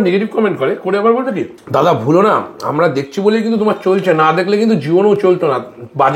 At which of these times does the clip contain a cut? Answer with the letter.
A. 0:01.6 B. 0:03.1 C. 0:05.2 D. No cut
A